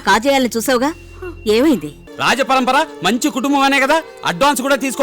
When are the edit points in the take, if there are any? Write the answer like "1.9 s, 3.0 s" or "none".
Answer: 2.1 s